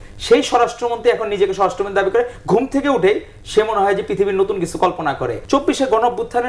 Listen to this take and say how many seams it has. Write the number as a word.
one